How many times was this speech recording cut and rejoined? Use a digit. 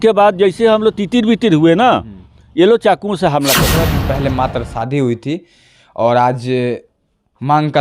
1